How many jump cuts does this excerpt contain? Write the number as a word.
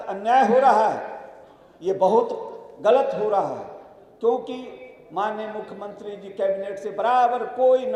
zero